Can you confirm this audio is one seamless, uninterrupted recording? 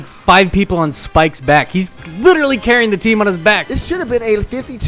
no; 1 cut; at 3.6 s

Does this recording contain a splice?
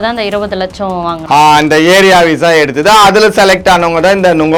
no; 0 cuts

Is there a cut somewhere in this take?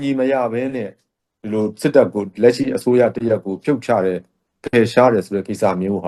no; 0 cuts

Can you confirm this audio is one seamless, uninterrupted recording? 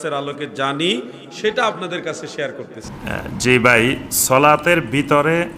no; 1 cut; at 2.8 s

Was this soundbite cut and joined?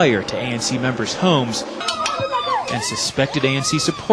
no; 0 cuts

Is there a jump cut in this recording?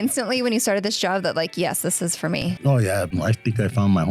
yes; 1 cut; at 3.1 s

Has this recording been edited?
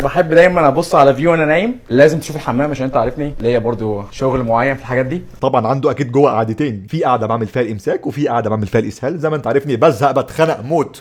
no; 0 cuts

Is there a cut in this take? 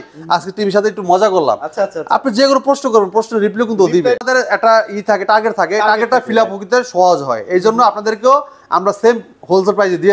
yes; 1 cut; at 4.2 s

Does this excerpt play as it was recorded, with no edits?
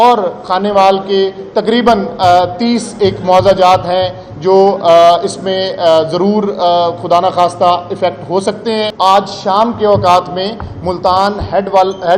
no; 1 cut; at 8.9 s

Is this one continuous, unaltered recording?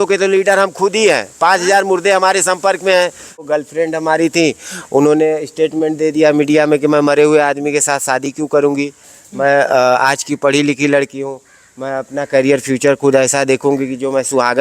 no; 1 cut; at 3.4 s

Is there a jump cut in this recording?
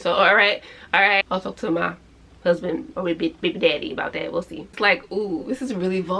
yes; 2 cuts; at 1.2 s, 4.7 s

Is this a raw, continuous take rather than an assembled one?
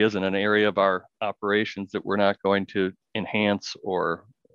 yes; 0 cuts

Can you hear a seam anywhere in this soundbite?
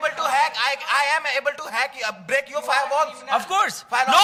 no; 0 cuts

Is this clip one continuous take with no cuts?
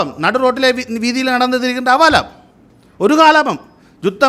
yes; 0 cuts

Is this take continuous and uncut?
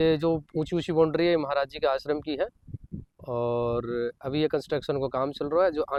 yes; 0 cuts

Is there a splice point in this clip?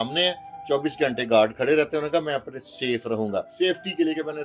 yes; 1 cut; at 3.5 s

